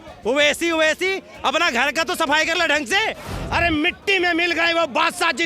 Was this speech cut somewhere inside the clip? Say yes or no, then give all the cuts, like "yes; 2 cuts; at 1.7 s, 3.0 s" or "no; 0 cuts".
yes; 1 cut; at 3.3 s